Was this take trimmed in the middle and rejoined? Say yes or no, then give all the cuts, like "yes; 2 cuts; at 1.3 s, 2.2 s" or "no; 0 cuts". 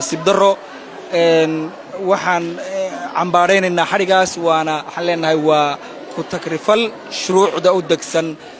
no; 0 cuts